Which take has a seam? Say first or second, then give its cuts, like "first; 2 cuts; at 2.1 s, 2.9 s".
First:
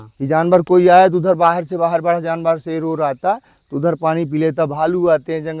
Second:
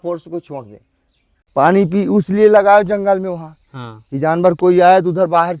second; 1 cut; at 1.3 s